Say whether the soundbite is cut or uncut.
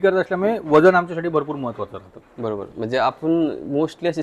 uncut